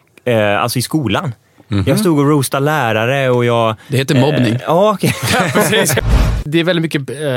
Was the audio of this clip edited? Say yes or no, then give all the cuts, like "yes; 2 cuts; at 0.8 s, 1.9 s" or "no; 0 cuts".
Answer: yes; 1 cut; at 6.2 s